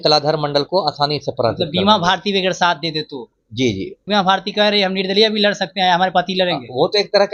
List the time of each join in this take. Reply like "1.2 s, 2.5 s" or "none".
4.0 s